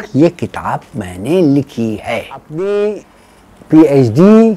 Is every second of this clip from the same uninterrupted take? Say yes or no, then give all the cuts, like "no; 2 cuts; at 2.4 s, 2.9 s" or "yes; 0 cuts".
no; 1 cut; at 2.4 s